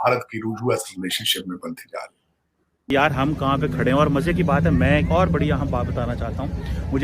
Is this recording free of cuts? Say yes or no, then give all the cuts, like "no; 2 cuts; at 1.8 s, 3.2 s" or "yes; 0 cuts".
no; 1 cut; at 2.9 s